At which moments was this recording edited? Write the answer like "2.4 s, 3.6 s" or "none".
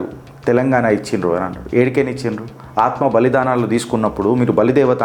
none